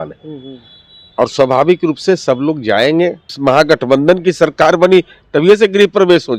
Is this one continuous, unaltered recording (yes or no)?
no